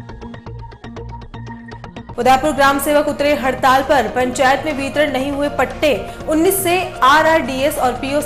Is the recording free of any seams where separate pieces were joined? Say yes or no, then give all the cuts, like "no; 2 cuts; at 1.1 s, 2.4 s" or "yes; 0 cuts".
no; 1 cut; at 2.0 s